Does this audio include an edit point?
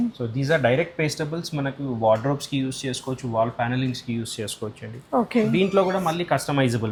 no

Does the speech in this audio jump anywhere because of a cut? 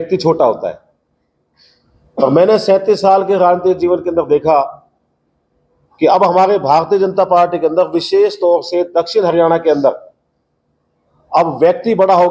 no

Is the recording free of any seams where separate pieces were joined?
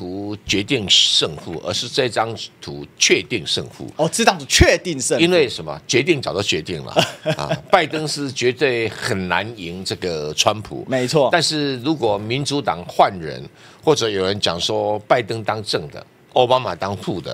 yes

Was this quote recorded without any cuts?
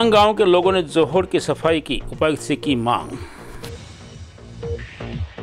no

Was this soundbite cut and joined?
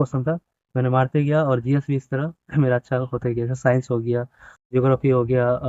no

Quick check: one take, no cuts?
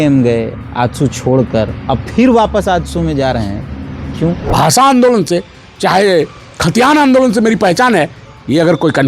no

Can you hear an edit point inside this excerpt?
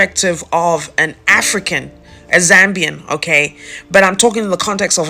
no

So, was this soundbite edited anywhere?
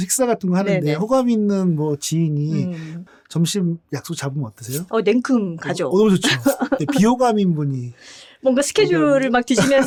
no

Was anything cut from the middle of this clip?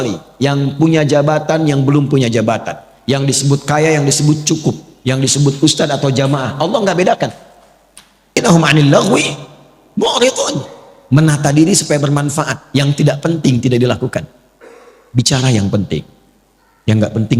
yes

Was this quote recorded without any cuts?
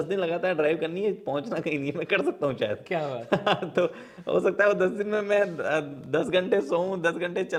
yes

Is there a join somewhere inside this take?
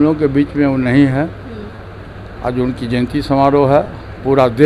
no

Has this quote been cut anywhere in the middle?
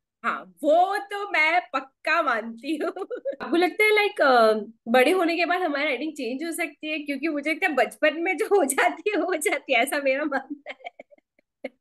yes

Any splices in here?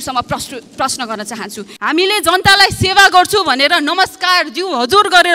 yes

